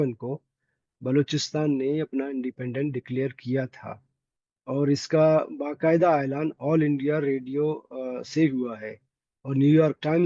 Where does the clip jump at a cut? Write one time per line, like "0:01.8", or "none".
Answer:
none